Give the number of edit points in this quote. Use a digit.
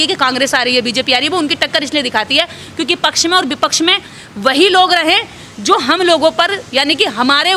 0